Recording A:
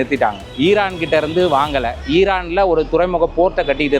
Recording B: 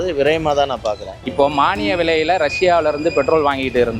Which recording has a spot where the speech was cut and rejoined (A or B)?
B